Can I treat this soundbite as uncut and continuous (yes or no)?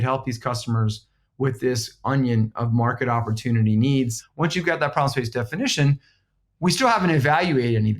no